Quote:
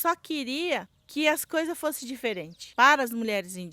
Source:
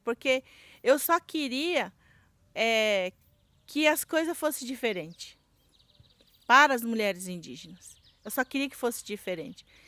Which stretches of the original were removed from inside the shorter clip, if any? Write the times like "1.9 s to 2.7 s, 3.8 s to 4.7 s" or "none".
2.0 s to 3.6 s, 5.2 s to 6.3 s